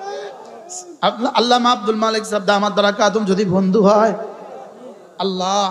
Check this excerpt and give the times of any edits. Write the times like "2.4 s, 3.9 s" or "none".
none